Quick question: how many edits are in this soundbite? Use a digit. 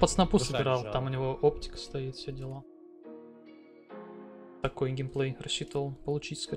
0